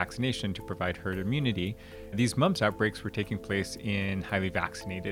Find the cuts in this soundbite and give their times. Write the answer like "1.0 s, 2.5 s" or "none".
2.1 s